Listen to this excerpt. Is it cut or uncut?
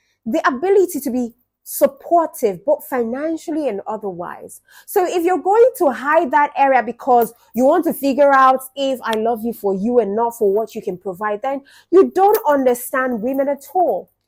uncut